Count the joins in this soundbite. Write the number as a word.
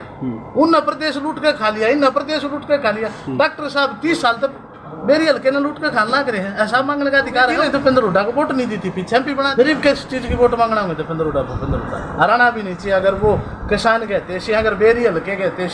two